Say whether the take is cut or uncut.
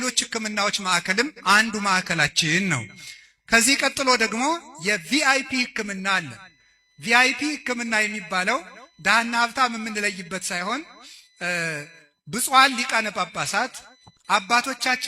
uncut